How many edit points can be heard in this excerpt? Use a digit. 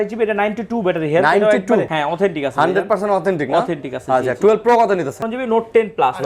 2